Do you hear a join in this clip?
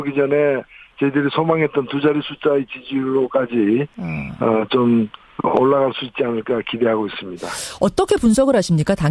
yes; 1 cut; at 2.3 s

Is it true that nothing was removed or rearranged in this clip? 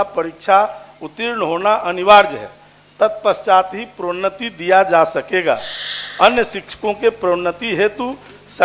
yes; 0 cuts

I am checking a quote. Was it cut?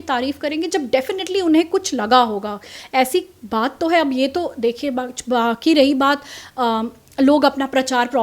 no; 0 cuts

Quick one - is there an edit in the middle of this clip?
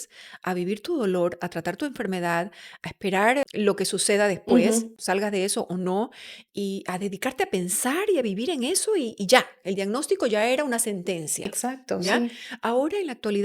yes; 2 cuts; at 3.4 s, 5.0 s

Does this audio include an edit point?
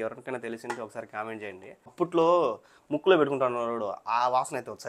yes; 1 cut; at 1.9 s

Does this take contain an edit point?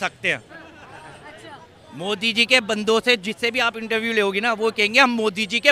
no; 0 cuts

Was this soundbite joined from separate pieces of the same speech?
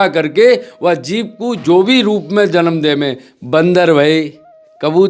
no; 0 cuts

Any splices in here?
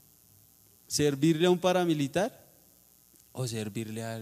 no; 0 cuts

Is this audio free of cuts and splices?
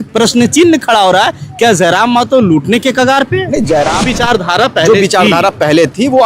no; 1 cut; at 4.1 s

